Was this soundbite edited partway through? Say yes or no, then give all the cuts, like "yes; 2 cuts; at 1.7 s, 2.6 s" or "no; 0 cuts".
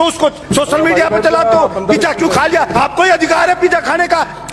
yes; 1 cut; at 2.7 s